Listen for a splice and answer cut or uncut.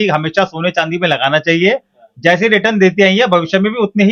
uncut